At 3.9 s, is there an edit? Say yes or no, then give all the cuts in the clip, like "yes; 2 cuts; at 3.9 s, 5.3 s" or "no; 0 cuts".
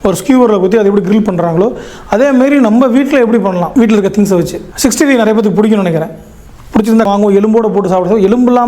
no; 1 cut; at 7.1 s